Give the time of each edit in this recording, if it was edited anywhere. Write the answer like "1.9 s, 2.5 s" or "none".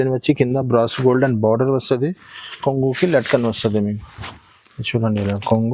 none